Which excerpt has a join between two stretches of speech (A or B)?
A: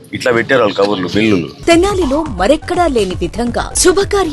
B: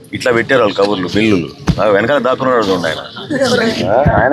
A